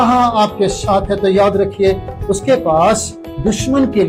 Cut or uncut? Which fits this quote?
uncut